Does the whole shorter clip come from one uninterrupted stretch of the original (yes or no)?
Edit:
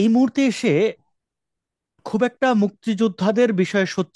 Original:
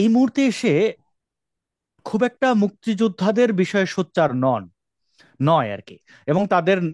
yes